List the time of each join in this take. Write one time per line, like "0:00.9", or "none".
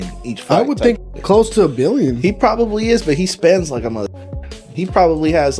none